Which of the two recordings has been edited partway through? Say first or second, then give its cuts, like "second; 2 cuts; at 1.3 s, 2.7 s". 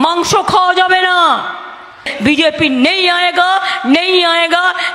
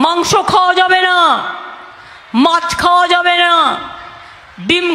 first; 1 cut; at 2.1 s